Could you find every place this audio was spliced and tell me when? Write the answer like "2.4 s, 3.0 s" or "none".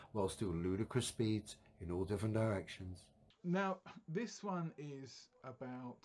none